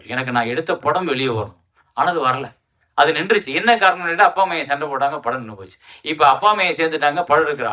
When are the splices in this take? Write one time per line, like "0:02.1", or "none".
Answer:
none